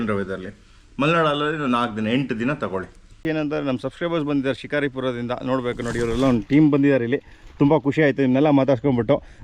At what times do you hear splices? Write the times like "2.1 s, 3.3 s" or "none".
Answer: 3.2 s